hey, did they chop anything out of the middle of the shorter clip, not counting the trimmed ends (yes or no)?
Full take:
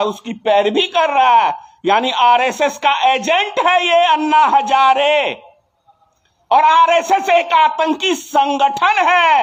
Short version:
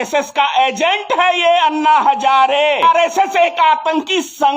yes